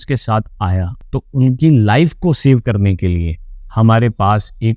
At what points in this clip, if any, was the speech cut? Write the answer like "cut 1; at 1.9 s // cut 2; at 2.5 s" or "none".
cut 1; at 1.0 s